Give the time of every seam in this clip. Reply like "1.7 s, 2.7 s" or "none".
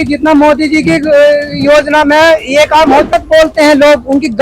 3.2 s

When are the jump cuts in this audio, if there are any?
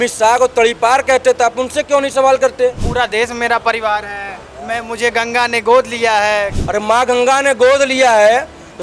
2.8 s, 6.5 s

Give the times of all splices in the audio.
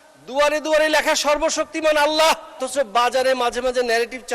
2.6 s

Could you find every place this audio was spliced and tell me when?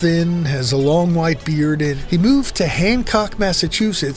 2.0 s

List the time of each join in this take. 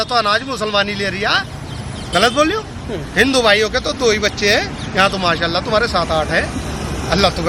none

